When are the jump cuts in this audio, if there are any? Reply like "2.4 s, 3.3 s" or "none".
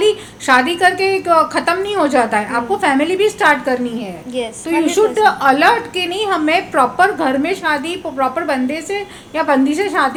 none